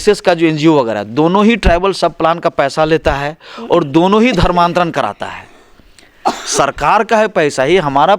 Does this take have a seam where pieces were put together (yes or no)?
no